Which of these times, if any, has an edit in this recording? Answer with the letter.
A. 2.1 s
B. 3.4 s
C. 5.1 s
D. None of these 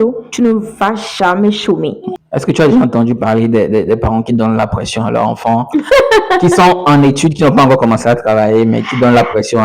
A